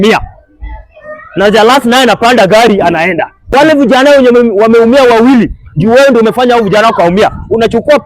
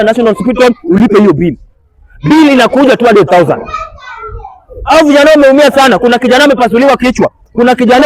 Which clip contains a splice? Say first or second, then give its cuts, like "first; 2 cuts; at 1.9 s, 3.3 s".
first; 1 cut; at 3.3 s